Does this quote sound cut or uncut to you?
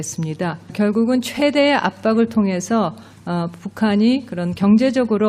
uncut